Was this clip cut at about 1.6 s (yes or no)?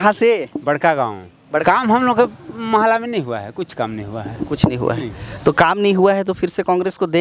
yes